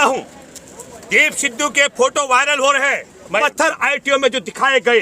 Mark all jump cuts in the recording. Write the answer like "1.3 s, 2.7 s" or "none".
3.4 s